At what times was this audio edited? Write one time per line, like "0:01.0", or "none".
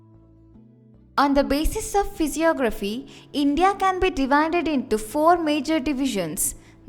0:01.1

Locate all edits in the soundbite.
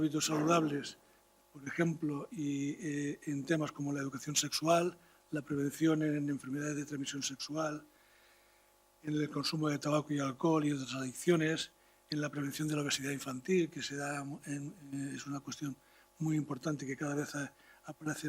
none

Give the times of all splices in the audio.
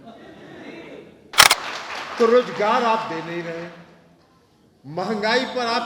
0:01.4

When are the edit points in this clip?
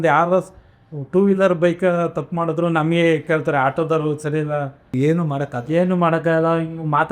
0:04.9

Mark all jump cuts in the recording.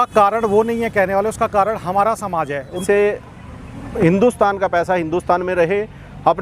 0:02.8

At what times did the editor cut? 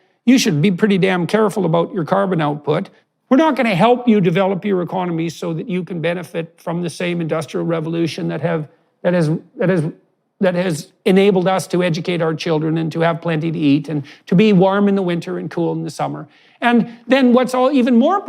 0:03.0

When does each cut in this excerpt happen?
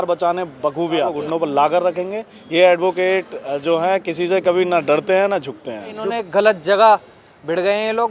0:01.2
0:06.1

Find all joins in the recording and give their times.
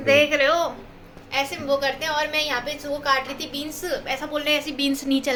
none

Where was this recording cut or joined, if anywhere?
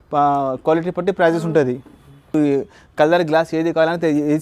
0:02.3

